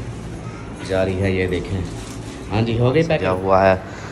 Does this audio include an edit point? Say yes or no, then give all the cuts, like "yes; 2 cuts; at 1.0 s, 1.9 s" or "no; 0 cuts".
yes; 1 cut; at 3.2 s